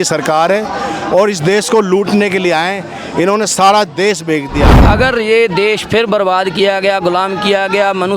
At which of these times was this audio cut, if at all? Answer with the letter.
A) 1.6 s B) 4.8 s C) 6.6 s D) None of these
B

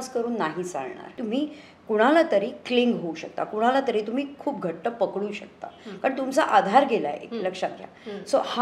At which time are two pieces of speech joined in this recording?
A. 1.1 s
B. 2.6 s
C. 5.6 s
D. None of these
A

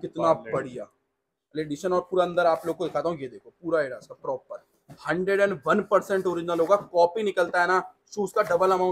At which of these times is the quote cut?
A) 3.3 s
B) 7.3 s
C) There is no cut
C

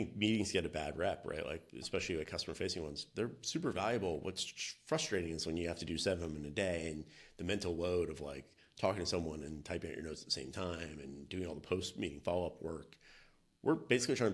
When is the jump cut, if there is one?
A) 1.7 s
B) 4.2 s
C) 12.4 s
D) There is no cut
A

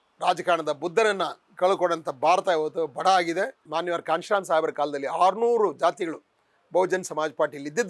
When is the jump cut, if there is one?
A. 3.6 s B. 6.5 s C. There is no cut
A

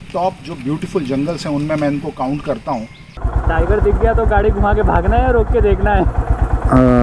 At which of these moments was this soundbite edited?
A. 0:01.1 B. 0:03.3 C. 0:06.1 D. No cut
B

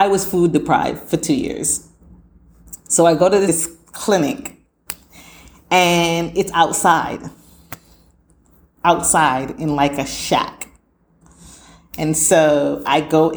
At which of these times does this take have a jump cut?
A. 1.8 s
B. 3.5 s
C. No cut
B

